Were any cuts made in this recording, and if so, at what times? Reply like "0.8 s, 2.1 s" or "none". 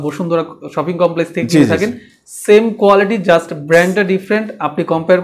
none